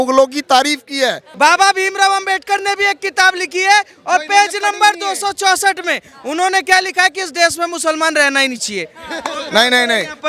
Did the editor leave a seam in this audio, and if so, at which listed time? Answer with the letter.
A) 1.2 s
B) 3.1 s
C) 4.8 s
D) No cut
A